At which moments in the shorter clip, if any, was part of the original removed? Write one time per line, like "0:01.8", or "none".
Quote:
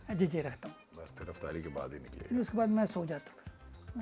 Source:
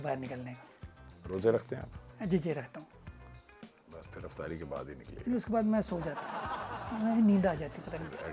0:00.9